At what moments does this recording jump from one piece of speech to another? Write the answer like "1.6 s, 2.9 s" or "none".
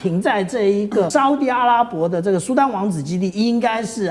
1.1 s